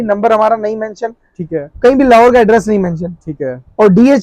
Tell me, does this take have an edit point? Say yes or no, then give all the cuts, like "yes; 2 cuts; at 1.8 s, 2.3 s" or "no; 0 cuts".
no; 0 cuts